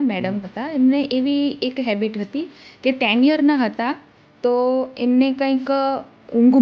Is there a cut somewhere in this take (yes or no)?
no